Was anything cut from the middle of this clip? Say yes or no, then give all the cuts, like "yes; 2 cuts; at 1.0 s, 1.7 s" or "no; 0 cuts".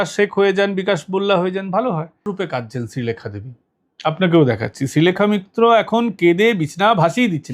yes; 1 cut; at 2.3 s